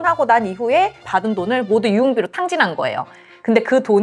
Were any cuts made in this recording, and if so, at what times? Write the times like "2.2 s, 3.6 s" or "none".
1.1 s